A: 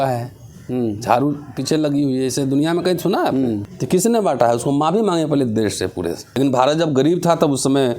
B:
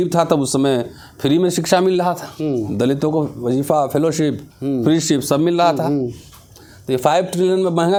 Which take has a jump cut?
A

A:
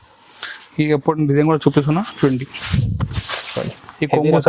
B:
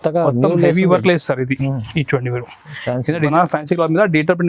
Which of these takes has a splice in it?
B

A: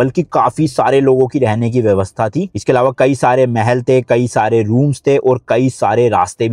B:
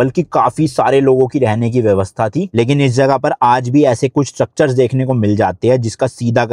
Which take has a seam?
B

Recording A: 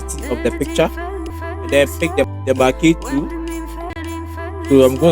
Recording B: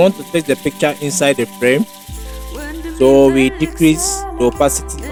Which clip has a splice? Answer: A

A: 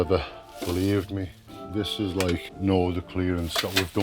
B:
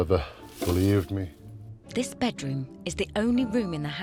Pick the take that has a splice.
A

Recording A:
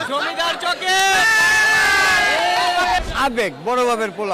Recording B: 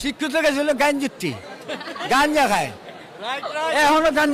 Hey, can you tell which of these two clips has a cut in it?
A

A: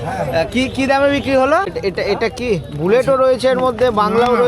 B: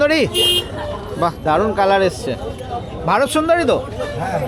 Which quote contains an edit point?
A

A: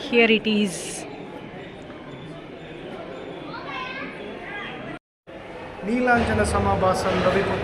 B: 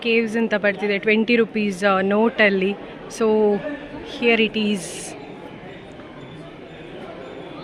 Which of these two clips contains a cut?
A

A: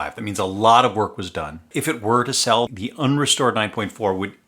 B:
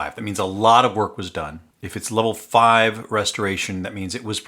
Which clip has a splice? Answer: A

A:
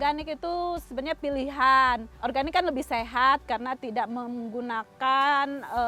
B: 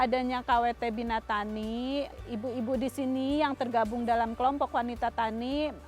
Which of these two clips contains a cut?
B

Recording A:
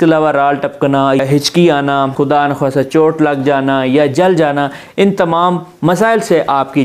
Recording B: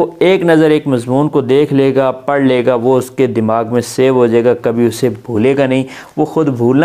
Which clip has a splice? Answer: A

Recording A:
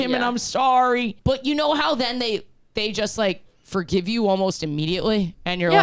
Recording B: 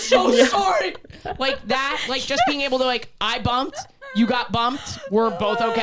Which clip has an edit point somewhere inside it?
A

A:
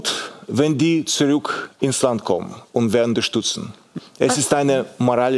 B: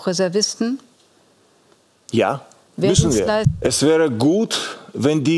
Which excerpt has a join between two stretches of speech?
B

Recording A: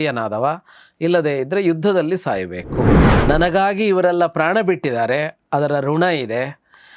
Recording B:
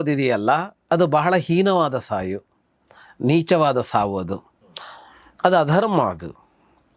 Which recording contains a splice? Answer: A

